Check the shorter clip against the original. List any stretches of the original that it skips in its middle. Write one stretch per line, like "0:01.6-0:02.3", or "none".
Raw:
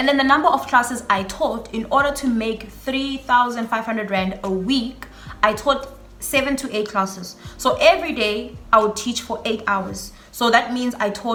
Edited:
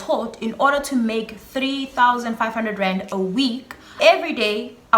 0:05.3-0:07.8